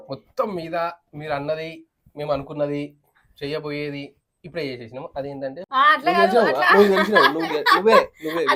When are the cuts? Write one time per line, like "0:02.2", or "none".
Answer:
0:05.7